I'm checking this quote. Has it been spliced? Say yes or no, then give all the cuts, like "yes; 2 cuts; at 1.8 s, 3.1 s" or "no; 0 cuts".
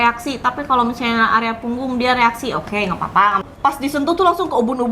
yes; 1 cut; at 3.5 s